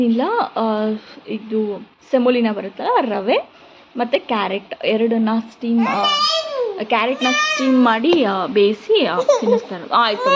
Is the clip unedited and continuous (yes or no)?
yes